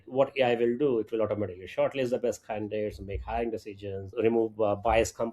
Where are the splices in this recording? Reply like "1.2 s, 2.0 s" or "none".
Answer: 4.1 s